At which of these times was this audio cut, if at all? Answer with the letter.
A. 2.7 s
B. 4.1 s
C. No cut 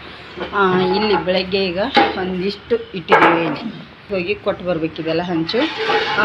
B